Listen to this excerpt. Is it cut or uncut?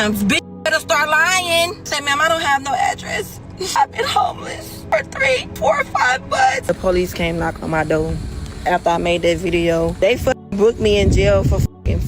cut